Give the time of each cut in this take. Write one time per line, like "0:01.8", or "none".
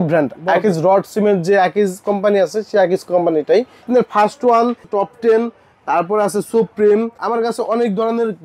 0:03.8
0:04.8
0:07.2